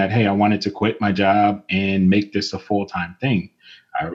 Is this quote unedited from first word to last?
yes; 0 cuts

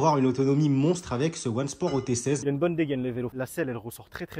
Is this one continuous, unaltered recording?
no; 2 cuts; at 2.4 s, 3.3 s

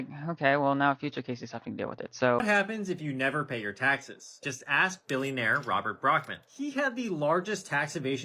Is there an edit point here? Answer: yes; 1 cut; at 2.4 s

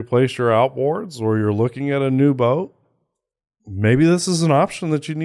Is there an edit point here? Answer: no; 0 cuts

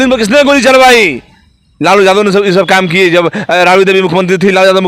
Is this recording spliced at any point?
no; 0 cuts

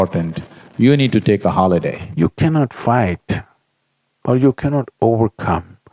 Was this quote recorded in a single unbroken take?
no; 1 cut; at 2.0 s

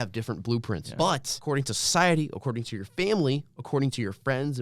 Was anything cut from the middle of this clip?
yes; 1 cut; at 0.9 s

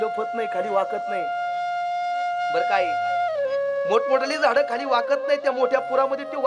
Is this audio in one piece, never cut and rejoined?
yes; 0 cuts

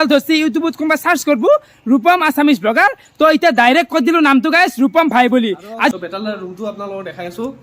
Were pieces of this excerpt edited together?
yes; 1 cut; at 5.9 s

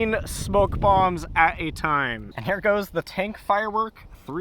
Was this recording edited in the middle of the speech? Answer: yes; 1 cut; at 2.2 s

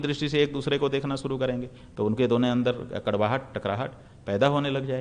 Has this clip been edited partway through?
no; 0 cuts

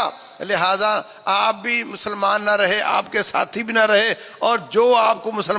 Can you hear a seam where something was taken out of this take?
no; 0 cuts

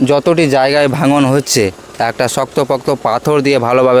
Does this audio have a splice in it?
no; 0 cuts

